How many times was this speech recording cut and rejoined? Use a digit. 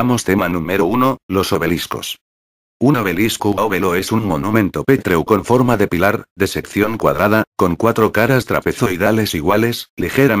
0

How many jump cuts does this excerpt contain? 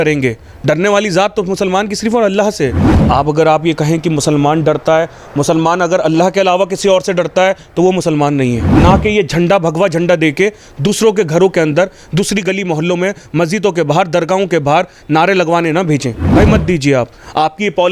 3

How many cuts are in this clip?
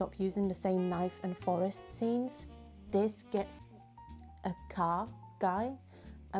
1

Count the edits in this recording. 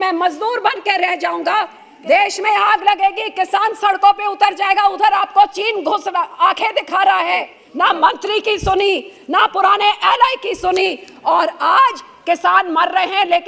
2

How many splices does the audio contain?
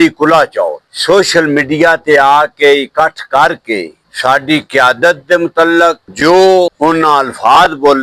0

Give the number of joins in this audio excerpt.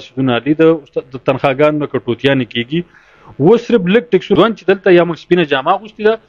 1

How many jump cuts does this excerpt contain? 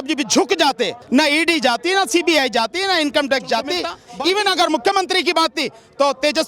2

